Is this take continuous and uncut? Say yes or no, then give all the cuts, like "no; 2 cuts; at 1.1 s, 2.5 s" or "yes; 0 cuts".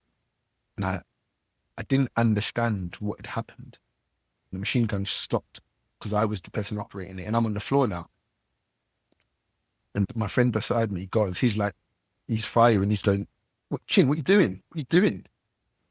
no; 2 cuts; at 4.5 s, 10.1 s